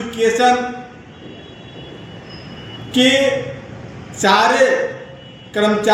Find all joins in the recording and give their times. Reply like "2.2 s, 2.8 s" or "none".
none